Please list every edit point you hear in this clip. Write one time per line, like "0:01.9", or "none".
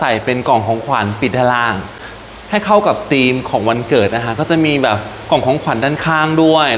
none